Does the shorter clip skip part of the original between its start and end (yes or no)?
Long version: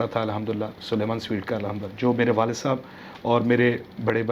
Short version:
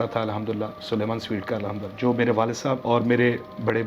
yes